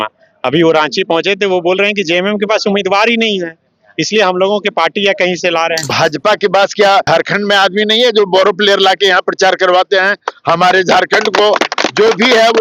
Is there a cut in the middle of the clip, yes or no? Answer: yes